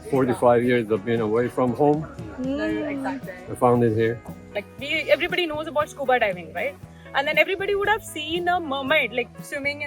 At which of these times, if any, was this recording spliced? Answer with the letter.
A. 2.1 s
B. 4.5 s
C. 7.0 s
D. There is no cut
B